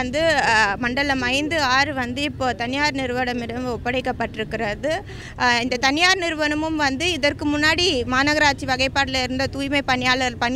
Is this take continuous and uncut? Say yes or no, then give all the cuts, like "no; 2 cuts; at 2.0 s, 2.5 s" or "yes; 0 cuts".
no; 1 cut; at 5.2 s